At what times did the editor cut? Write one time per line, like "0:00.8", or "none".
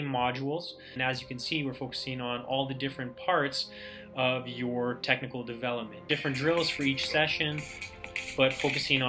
0:00.9
0:06.1